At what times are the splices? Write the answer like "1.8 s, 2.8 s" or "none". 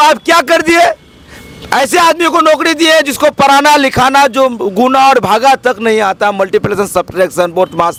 none